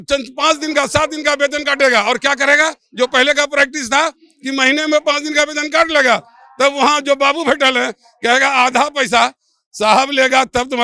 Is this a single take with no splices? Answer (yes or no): yes